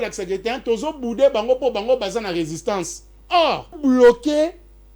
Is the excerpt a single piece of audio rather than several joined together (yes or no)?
no